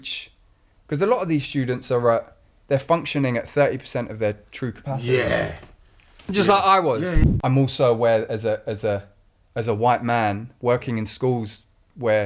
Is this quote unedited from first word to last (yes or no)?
no